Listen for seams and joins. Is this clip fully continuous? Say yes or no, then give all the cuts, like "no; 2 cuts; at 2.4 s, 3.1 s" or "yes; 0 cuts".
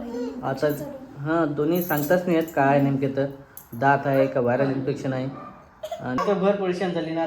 no; 1 cut; at 6.2 s